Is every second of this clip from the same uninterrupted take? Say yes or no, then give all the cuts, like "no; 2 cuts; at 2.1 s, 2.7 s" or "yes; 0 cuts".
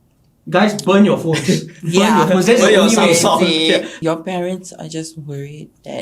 no; 1 cut; at 3.9 s